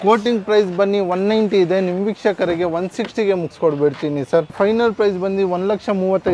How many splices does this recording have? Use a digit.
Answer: 1